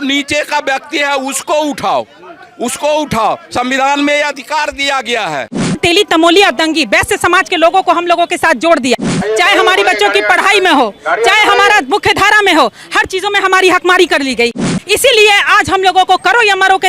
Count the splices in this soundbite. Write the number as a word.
three